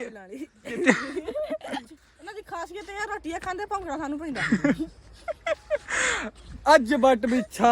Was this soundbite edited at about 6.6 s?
no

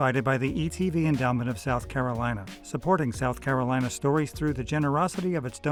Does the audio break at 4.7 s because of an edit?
no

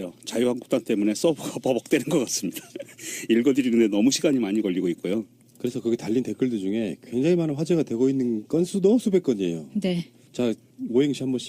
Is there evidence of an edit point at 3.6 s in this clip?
no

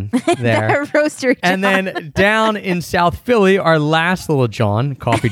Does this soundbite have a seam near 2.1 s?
no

